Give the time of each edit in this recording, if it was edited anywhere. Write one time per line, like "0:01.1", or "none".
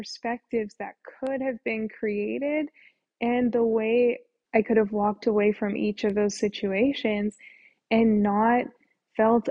0:04.3

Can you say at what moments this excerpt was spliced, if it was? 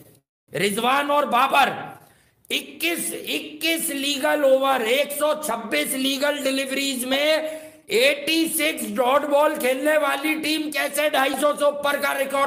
none

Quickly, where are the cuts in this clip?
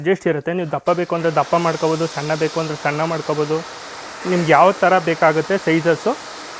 none

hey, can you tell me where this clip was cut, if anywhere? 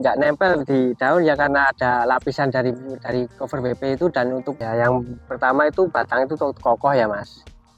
0:04.6

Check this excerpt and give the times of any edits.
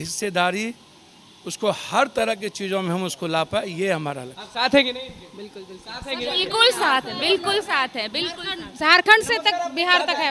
none

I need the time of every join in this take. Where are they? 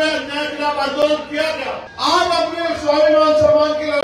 0:01.9

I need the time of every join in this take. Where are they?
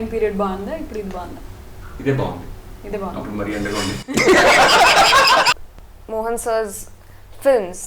0:05.5

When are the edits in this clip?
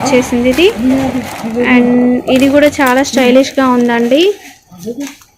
none

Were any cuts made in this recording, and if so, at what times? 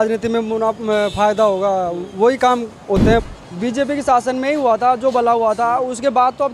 0:03.2

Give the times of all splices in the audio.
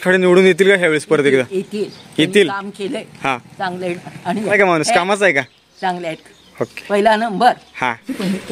none

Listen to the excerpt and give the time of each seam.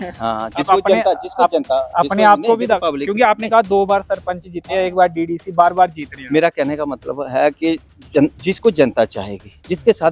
none

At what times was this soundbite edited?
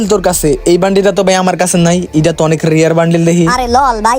none

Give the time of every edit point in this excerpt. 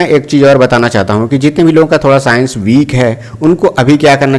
none

